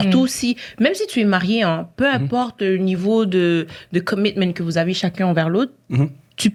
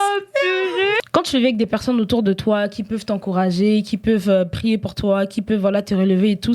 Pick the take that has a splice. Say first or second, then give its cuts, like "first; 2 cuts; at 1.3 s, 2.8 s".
second; 1 cut; at 1.0 s